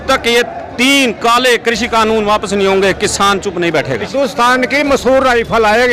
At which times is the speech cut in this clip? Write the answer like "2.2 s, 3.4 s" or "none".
4.1 s